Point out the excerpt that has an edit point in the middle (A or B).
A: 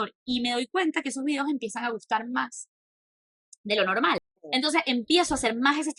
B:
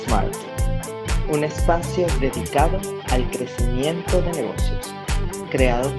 A